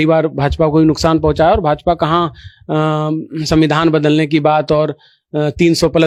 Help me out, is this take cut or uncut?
uncut